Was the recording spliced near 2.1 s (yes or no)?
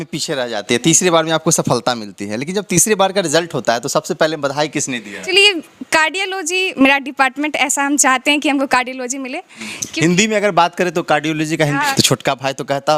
no